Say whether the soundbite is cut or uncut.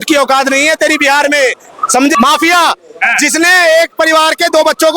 cut